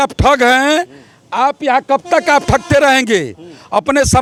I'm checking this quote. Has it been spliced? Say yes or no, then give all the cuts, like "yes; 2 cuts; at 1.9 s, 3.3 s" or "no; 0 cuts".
no; 0 cuts